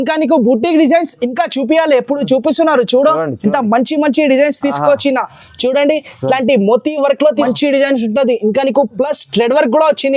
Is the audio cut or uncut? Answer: cut